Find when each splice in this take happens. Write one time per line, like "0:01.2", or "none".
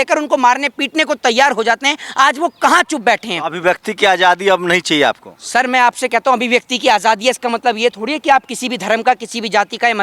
none

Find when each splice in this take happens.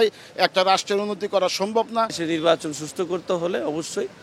0:02.2

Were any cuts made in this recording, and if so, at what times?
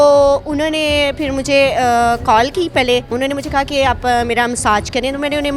0:03.1

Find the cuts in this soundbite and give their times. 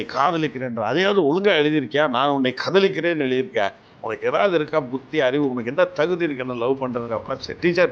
none

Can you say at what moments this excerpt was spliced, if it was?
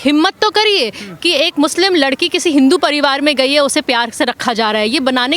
none

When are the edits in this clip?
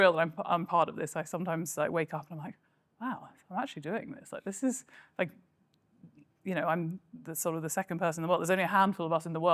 none

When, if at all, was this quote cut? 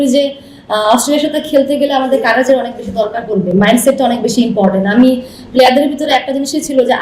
none

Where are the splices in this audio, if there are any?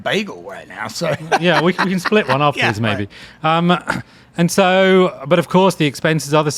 none

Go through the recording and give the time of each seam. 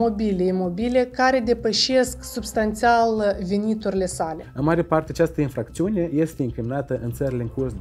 0:04.4

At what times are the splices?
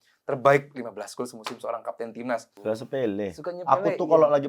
0:02.5

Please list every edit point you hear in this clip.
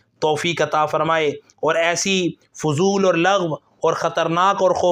none

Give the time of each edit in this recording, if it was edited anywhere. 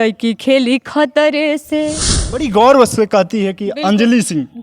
0:02.5

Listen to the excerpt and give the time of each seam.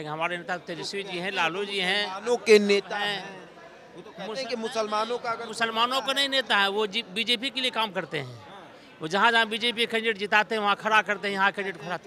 none

